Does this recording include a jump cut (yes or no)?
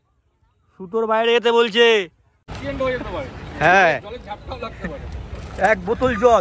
yes